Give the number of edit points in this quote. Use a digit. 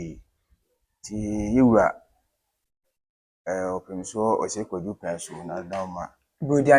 0